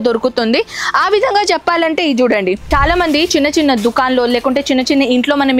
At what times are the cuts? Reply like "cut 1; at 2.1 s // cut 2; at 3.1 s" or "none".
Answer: cut 1; at 2.7 s